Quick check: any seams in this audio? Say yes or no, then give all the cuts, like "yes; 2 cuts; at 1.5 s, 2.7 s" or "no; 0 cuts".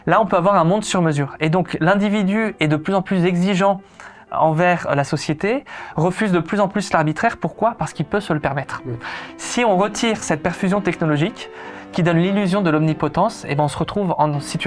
no; 0 cuts